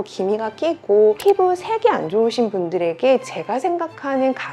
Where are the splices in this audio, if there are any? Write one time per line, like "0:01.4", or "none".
none